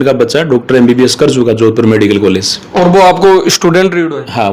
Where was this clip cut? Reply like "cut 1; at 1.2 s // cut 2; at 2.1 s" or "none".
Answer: none